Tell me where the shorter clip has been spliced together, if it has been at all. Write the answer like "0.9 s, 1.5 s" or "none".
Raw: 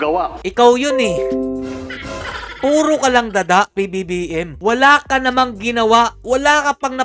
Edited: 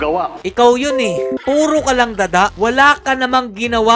1.4 s, 2.5 s